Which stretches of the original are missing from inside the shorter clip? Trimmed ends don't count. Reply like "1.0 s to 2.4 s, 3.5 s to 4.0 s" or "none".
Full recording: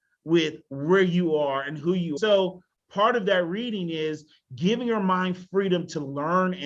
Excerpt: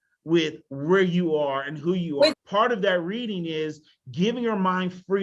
2.1 s to 2.6 s